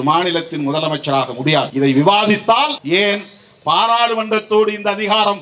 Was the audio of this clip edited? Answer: yes; 2 cuts; at 1.7 s, 2.8 s

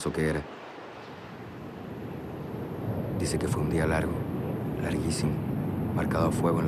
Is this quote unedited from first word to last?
yes; 0 cuts

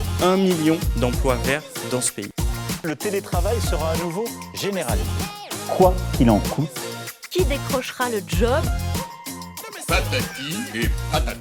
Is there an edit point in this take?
no; 0 cuts

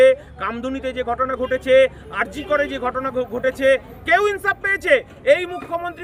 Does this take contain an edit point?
no; 0 cuts

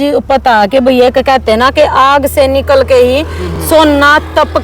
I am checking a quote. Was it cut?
no; 0 cuts

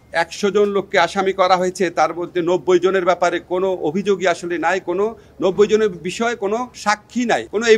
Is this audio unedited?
yes; 0 cuts

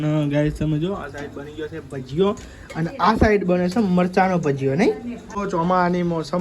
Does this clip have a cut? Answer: yes; 1 cut; at 5.4 s

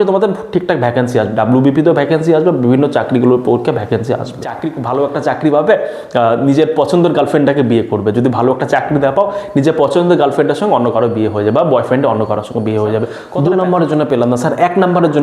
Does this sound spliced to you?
yes; 2 cuts; at 4.8 s, 13.2 s

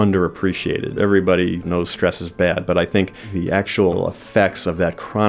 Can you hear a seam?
yes; 4 cuts; at 0.9 s, 1.6 s, 3.2 s, 3.9 s

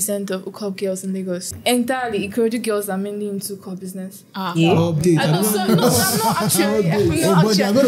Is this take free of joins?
no; 1 cut; at 1.5 s

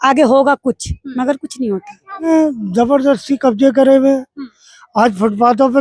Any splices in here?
yes; 1 cut; at 2.3 s

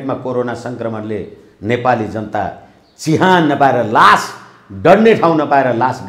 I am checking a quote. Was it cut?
no; 0 cuts

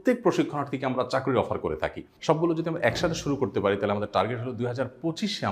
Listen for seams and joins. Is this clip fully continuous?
no; 1 cut; at 2.1 s

